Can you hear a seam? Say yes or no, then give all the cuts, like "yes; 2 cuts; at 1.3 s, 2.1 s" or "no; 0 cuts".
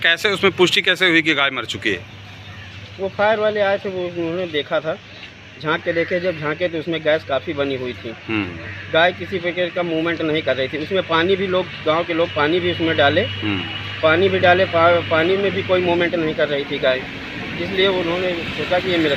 no; 0 cuts